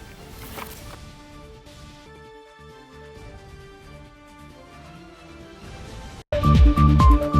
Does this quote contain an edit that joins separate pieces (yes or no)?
no